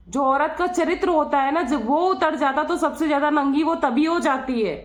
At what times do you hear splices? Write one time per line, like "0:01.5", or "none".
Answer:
none